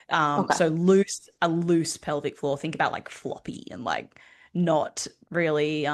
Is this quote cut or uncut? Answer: uncut